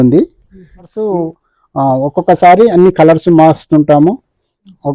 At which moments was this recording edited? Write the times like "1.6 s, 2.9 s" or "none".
1.0 s